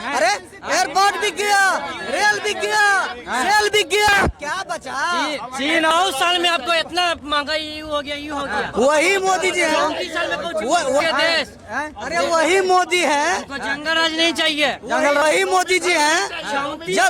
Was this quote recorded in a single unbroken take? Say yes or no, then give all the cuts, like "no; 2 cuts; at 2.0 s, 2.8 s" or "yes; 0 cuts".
no; 3 cuts; at 5.9 s, 11.0 s, 15.2 s